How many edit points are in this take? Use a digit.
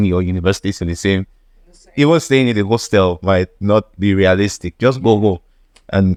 0